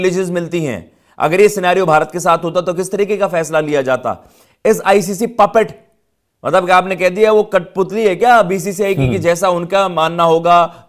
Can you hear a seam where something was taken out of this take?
no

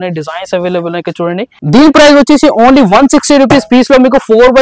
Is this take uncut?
no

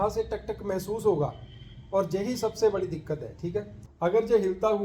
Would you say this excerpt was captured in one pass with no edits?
no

